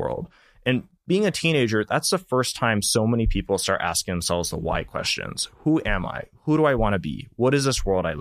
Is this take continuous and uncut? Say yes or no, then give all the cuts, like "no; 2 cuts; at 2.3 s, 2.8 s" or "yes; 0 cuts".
no; 1 cut; at 0.9 s